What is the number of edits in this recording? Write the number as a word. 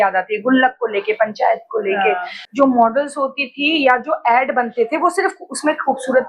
one